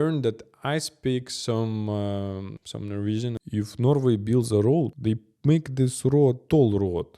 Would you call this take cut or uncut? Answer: cut